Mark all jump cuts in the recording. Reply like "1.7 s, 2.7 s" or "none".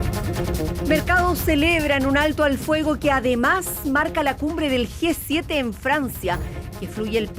1.0 s